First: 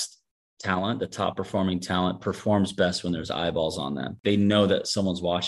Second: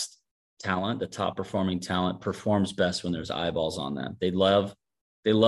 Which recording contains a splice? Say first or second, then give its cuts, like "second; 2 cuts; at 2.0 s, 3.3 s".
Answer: first; 1 cut; at 4.1 s